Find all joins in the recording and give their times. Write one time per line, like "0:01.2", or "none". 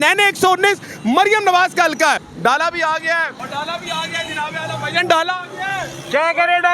0:02.3
0:03.4